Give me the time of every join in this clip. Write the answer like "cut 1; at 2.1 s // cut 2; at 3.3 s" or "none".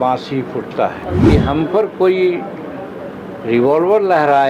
cut 1; at 1.0 s